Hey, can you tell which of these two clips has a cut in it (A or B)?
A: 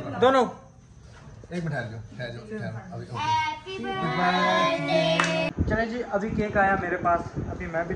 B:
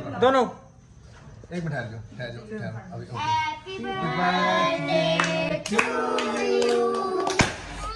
A